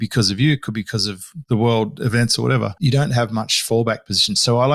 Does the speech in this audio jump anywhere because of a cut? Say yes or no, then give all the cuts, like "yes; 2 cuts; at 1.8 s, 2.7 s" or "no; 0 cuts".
yes; 2 cuts; at 1.3 s, 2.8 s